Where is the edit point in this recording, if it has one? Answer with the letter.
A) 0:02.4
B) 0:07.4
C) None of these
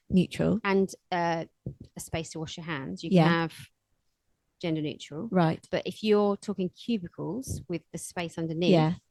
C